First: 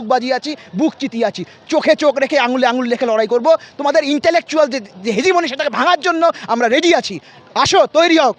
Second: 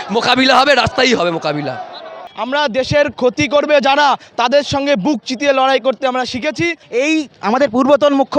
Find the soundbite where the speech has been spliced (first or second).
second